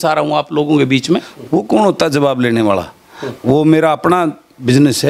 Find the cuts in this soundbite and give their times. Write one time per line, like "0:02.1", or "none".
0:01.3